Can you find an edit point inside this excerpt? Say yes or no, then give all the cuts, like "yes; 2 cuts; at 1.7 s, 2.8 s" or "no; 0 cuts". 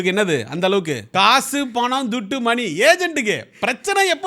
yes; 1 cut; at 1.1 s